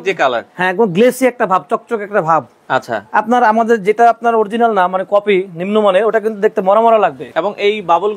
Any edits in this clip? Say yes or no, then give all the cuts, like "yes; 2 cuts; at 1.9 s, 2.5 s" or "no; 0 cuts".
no; 0 cuts